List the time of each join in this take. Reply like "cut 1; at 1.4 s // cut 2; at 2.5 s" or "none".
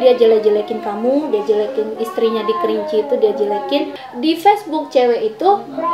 cut 1; at 4.0 s